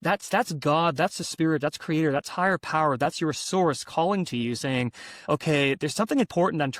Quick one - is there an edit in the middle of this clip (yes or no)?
no